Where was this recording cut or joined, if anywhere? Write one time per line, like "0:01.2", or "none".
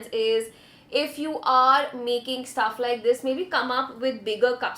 none